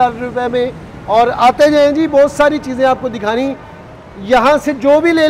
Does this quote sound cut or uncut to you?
uncut